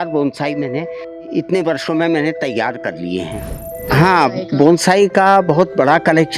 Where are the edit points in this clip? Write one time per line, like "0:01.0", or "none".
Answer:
0:03.8